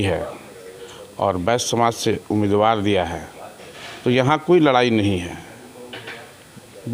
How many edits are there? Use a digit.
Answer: 0